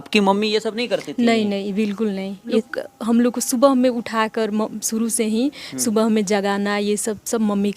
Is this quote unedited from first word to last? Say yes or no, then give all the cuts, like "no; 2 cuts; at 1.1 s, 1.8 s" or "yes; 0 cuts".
no; 1 cut; at 2.7 s